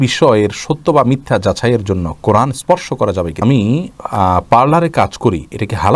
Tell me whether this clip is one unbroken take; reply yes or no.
no